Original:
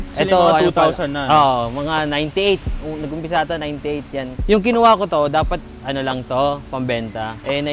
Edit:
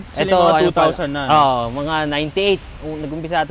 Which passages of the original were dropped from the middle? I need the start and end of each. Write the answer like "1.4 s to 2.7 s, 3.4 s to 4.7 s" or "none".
none